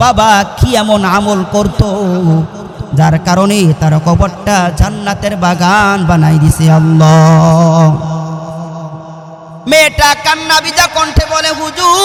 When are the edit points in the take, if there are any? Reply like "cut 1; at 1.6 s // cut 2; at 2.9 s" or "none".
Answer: none